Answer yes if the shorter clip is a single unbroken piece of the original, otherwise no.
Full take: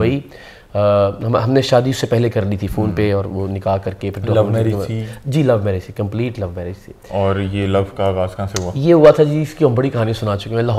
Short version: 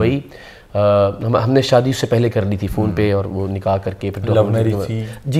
yes